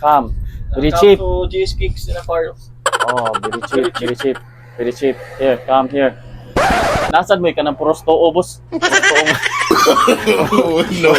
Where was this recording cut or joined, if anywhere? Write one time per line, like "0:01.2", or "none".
0:07.1
0:08.6